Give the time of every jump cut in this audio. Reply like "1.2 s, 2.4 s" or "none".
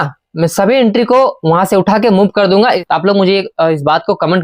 2.8 s

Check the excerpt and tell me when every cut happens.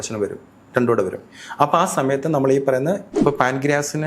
3.1 s

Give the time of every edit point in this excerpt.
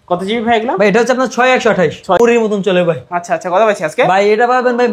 2.2 s

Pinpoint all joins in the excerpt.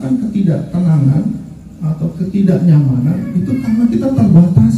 none

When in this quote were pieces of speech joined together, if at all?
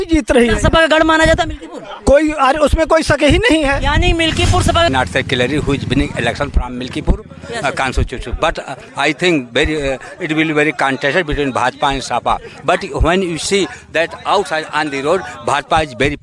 4.9 s

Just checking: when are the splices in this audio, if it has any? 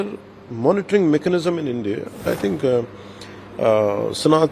2.3 s

